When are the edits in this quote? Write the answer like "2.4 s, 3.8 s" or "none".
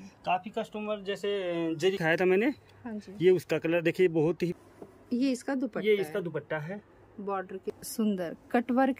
2.0 s, 4.5 s, 7.8 s